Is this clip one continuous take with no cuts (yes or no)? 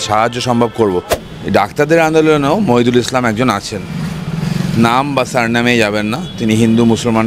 no